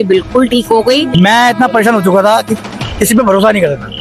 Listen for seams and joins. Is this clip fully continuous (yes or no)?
no